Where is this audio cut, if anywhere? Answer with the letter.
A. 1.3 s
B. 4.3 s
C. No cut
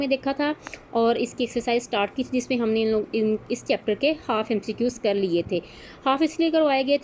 C